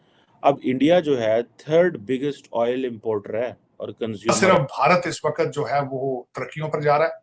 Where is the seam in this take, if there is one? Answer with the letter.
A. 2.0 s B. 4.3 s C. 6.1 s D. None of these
B